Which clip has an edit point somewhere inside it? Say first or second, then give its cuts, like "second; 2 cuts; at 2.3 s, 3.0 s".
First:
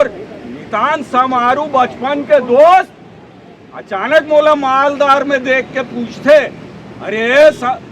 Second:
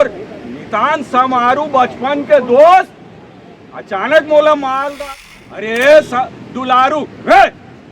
second; 1 cut; at 5.0 s